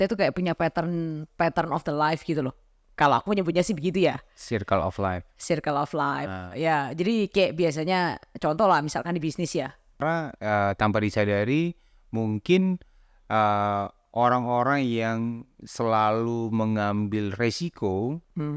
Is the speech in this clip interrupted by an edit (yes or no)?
yes